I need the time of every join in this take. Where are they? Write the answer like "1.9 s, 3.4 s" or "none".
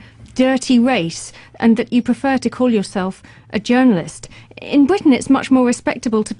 none